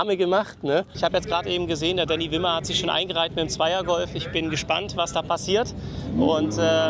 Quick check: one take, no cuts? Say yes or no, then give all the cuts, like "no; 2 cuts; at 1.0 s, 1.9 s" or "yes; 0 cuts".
no; 1 cut; at 0.9 s